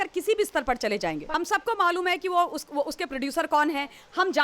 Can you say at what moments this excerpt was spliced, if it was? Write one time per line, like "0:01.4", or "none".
0:01.2